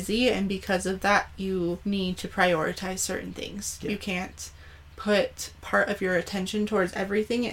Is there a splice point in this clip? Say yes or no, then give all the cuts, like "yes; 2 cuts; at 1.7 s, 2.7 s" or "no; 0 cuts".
yes; 1 cut; at 1.8 s